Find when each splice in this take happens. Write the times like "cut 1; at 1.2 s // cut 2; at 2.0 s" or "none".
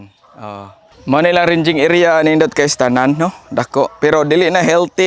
cut 1; at 0.9 s